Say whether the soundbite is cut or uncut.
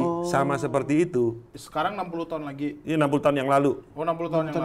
cut